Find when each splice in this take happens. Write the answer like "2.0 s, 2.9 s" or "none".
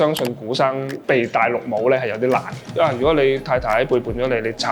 1.0 s, 2.8 s